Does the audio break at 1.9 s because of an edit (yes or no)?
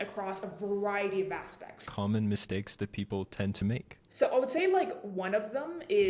yes